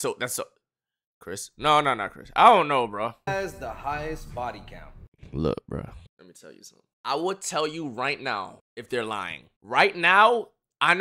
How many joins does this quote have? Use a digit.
1